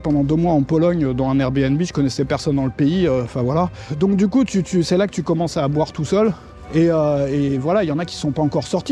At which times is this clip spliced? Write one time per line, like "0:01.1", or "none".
0:03.8
0:06.5